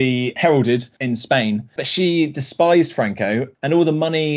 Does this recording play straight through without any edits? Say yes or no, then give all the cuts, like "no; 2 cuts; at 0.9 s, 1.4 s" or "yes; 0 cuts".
no; 2 cuts; at 1.0 s, 3.5 s